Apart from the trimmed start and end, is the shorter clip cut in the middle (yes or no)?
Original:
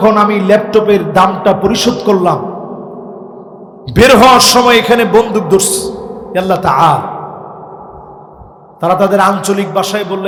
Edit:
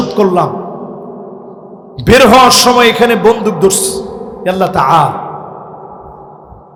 no